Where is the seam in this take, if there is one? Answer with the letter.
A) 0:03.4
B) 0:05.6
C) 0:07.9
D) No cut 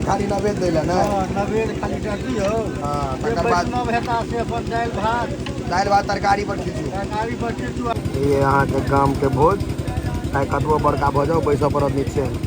C